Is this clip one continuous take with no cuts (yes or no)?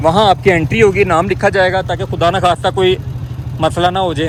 yes